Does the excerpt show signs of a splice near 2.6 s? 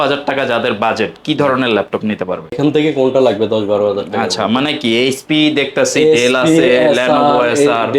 yes; 1 cut; at 2.6 s

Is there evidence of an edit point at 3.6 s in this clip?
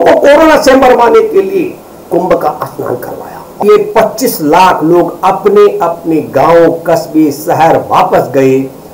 yes; 1 cut; at 3.6 s

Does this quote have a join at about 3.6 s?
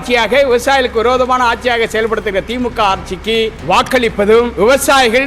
yes; 2 cuts; at 3.6 s, 4.5 s

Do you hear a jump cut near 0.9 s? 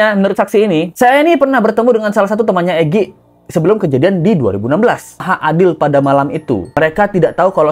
yes; 2 cuts; at 0.9 s, 5.3 s

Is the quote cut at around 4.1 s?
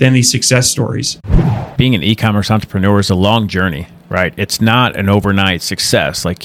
no; 1 cut; at 1.2 s

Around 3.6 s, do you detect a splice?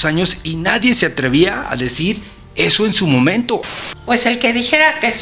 yes; 1 cut; at 3.6 s

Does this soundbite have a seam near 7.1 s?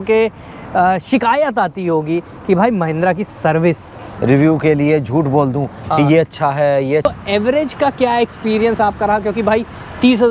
yes; 2 cuts; at 4.1 s, 7.1 s

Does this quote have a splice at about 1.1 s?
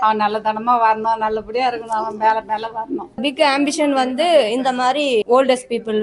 no; 2 cuts; at 3.2 s, 5.2 s

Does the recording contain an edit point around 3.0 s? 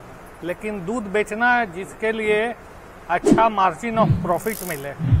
no; 0 cuts

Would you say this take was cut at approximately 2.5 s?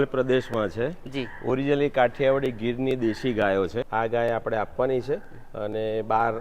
no; 1 cut; at 3.8 s

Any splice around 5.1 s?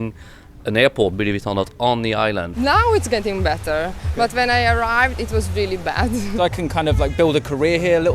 no; 2 cuts; at 2.5 s, 6.3 s

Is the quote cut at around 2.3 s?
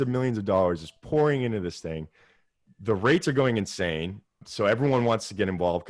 no; 1 cut; at 4.4 s

